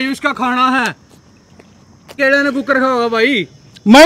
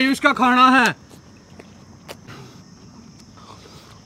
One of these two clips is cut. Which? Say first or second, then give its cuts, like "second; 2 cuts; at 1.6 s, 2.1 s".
first; 1 cut; at 2.1 s